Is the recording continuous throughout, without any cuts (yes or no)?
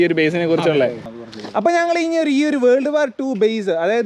yes